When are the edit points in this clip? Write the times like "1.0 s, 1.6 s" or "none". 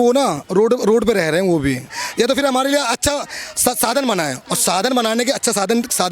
2.0 s

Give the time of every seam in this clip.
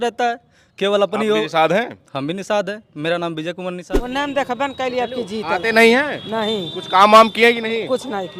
3.8 s

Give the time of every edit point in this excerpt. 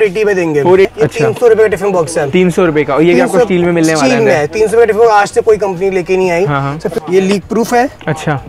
0.9 s, 6.9 s

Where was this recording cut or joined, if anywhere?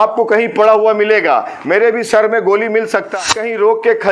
3.1 s

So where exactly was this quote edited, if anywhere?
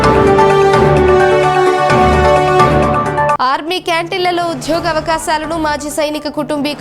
1.2 s

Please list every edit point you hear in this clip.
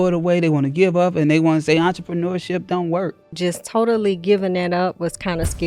3.3 s

